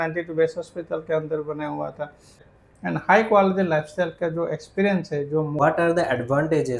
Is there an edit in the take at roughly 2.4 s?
yes; 2 cuts; at 2.4 s, 5.6 s

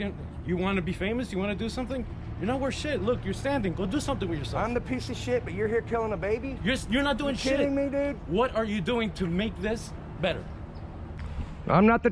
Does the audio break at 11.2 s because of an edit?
yes; 1 cut; at 11.2 s

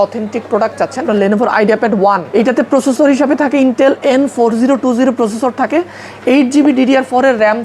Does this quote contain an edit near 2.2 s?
yes; 2 cuts; at 1.1 s, 2.2 s

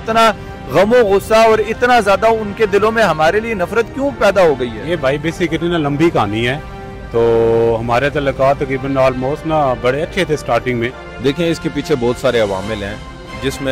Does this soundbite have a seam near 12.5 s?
no; 1 cut; at 11.1 s

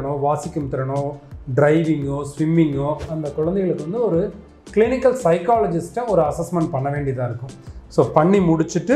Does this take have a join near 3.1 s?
yes; 1 cut; at 3.1 s

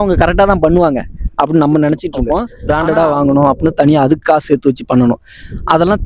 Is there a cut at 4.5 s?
no; 1 cut; at 2.5 s

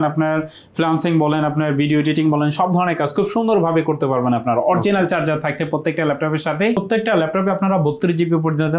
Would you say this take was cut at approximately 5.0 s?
no; 1 cut; at 6.8 s

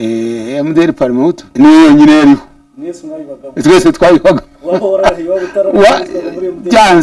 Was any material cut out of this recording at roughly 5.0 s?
no; 1 cut; at 1.4 s

